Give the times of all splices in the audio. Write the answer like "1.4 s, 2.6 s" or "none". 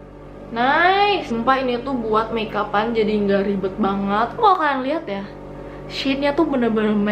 1.3 s, 4.3 s